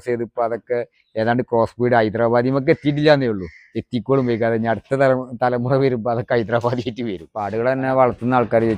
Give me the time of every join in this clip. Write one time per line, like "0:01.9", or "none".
0:07.3